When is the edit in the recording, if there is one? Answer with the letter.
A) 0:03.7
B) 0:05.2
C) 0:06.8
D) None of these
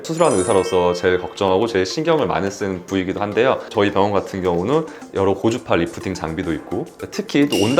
A